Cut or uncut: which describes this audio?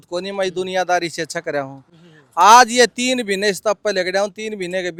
uncut